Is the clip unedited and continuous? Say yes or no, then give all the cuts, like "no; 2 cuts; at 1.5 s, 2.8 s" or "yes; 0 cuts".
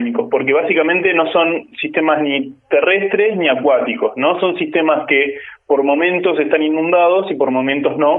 yes; 0 cuts